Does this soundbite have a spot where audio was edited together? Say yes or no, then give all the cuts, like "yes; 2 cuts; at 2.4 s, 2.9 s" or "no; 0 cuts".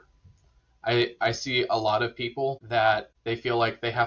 yes; 2 cuts; at 2.6 s, 3.1 s